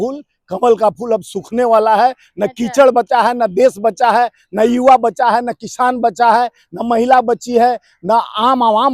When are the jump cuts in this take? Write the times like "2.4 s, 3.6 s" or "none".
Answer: none